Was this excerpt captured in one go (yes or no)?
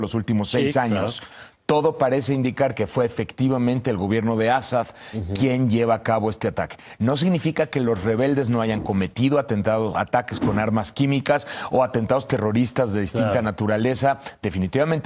no